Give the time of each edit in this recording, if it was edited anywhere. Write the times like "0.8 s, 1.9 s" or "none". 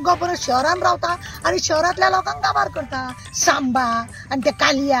3.2 s